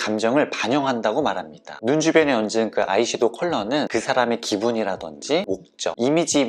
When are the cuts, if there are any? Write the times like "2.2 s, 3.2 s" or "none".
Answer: none